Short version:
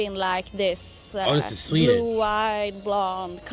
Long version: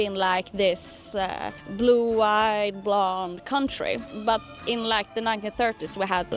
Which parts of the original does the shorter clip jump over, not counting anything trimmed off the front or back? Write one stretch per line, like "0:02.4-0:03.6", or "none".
none